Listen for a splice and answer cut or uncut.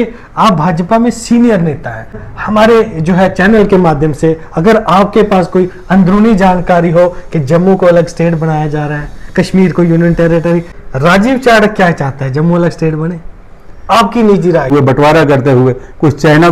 cut